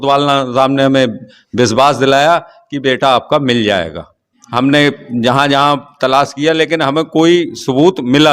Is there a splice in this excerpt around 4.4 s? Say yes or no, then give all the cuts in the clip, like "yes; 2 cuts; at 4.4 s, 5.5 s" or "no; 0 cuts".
yes; 1 cut; at 4.4 s